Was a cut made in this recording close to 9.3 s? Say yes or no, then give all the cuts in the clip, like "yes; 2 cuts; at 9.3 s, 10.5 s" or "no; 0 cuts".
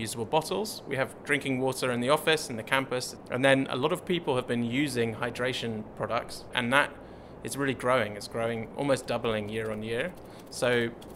no; 2 cuts; at 3.1 s, 6.5 s